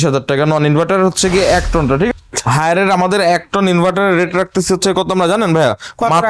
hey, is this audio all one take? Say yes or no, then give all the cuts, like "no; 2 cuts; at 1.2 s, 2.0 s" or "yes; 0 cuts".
no; 1 cut; at 2.1 s